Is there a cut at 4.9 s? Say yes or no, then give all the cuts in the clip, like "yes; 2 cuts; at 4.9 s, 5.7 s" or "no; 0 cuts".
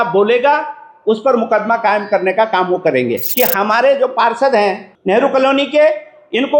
yes; 2 cuts; at 3.2 s, 4.9 s